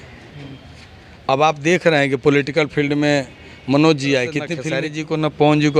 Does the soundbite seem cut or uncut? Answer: cut